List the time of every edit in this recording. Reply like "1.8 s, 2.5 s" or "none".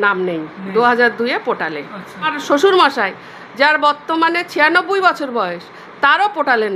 2.4 s